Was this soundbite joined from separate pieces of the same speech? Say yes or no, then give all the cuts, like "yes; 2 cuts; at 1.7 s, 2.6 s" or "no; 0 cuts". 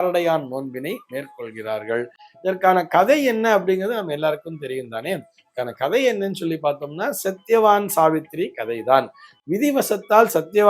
no; 0 cuts